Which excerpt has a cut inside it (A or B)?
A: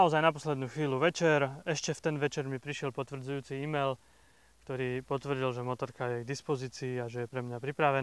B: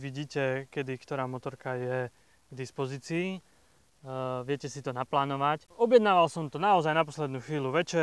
B